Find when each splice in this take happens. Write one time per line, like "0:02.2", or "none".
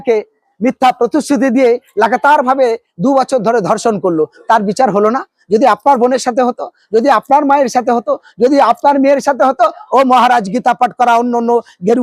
none